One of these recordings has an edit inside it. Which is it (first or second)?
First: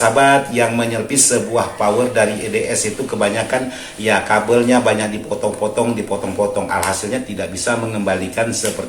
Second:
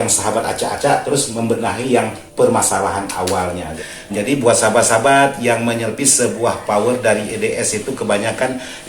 second